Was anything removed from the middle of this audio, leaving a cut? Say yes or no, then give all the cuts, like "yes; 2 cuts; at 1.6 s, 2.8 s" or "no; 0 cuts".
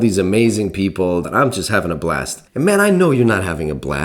yes; 2 cuts; at 1.3 s, 2.4 s